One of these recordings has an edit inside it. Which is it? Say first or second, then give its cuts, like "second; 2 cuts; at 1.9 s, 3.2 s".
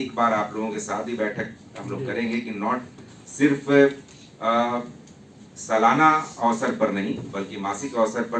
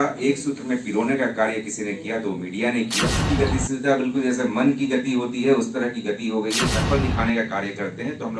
second; 2 cuts; at 3.2 s, 6.7 s